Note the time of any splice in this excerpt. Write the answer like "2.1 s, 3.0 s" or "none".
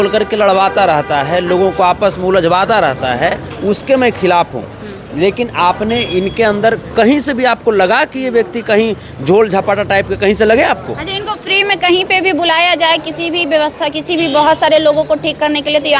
none